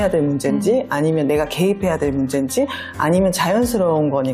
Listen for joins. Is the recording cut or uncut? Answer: uncut